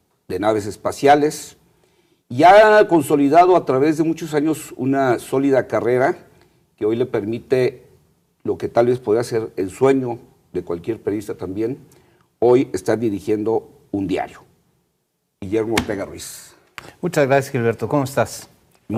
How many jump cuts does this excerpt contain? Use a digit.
0